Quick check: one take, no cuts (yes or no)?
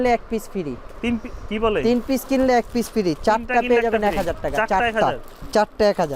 yes